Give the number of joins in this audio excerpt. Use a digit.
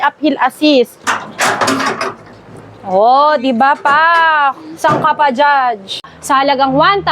2